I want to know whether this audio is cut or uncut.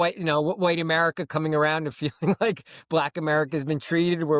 uncut